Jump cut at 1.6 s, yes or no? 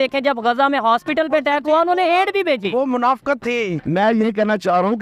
no